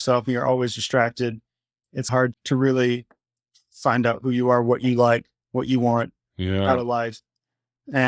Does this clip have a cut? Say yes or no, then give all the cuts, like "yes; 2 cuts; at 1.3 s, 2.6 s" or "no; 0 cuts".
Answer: no; 0 cuts